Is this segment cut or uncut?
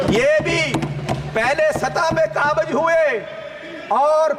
uncut